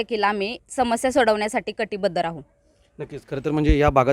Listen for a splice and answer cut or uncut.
uncut